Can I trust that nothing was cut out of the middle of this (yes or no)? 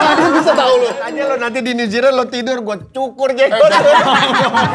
no